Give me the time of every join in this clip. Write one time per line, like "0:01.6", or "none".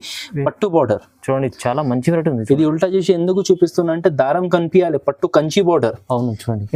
none